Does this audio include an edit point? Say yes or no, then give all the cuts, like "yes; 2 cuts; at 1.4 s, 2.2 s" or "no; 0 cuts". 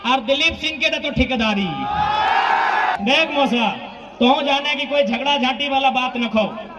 yes; 1 cut; at 2.9 s